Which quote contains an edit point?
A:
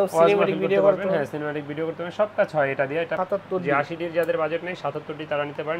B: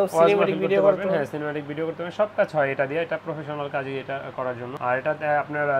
A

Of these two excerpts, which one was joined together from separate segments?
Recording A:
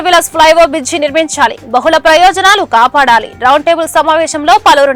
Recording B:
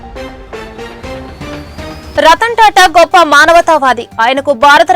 B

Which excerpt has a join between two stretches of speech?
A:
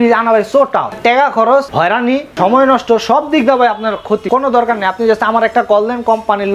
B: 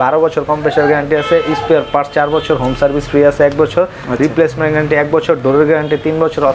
A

